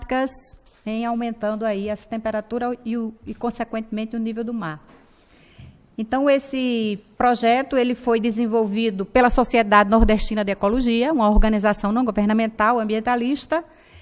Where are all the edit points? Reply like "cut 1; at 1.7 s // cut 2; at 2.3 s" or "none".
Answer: cut 1; at 9.5 s